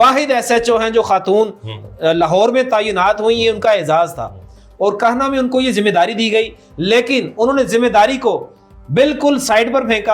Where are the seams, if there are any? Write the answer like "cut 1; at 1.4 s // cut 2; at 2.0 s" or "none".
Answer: none

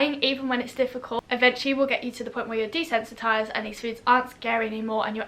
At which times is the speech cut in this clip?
cut 1; at 1.2 s

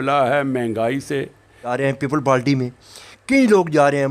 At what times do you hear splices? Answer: cut 1; at 1.7 s

